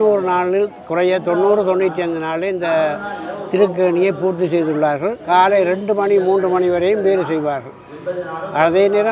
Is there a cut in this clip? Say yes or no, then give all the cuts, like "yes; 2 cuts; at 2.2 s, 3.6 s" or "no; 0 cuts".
yes; 1 cut; at 5.2 s